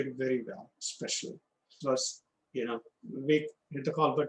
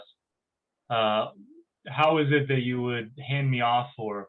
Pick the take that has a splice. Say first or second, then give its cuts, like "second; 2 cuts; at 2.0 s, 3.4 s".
first; 1 cut; at 1.8 s